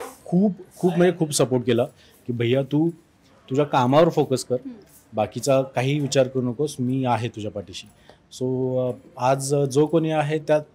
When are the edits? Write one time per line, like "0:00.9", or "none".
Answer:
none